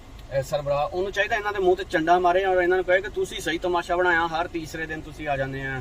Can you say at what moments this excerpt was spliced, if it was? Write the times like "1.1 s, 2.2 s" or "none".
none